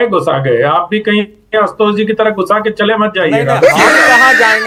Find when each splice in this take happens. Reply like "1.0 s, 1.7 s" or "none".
none